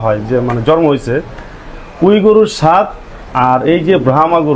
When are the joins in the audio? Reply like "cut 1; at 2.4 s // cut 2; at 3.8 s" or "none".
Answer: none

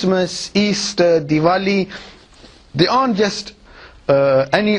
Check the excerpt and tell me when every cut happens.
none

